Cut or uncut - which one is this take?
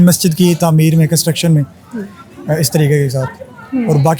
uncut